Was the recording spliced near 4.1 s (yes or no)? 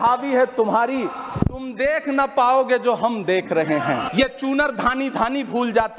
yes